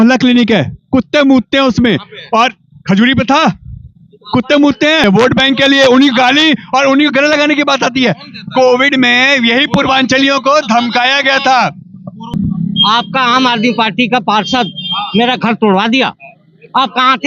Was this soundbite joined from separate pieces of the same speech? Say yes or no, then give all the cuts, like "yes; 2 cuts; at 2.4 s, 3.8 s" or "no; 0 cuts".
yes; 2 cuts; at 5.0 s, 12.3 s